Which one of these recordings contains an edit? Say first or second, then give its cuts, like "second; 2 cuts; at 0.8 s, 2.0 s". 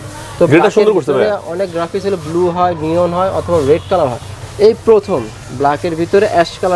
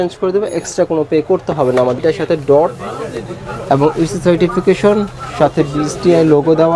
second; 1 cut; at 2.0 s